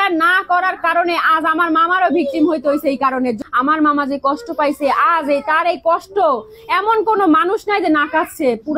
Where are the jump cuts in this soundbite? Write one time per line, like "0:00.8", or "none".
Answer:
0:03.4